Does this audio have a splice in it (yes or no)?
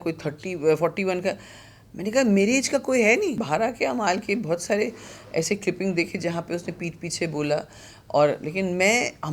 yes